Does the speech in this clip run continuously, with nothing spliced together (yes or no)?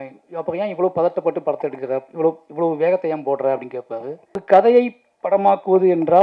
no